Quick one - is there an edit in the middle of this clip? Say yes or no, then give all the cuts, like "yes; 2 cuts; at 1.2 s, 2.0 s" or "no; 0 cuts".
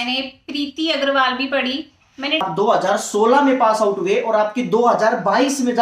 yes; 1 cut; at 2.4 s